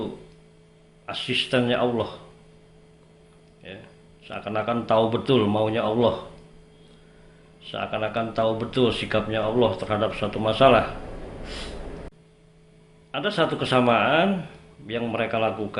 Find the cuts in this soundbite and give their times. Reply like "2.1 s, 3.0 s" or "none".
12.1 s